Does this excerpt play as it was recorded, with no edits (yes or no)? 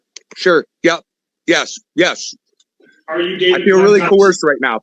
yes